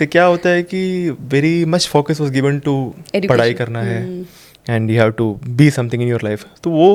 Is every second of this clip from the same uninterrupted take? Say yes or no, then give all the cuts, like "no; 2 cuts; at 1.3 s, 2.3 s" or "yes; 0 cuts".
yes; 0 cuts